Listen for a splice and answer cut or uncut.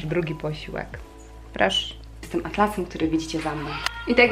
cut